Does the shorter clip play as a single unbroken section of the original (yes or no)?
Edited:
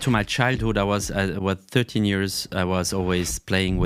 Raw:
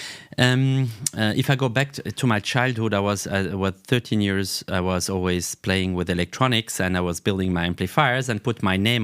yes